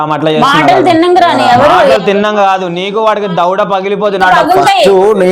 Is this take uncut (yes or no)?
yes